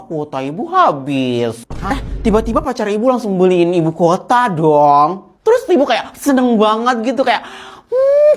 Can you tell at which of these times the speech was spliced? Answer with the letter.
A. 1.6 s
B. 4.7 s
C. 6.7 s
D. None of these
A